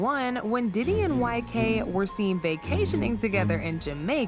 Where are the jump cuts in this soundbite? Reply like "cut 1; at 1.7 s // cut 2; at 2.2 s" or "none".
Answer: none